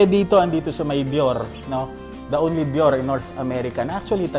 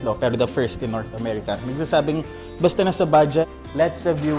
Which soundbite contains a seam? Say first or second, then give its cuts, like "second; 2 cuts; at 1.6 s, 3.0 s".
second; 1 cut; at 3.4 s